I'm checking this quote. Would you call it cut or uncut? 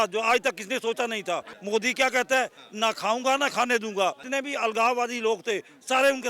cut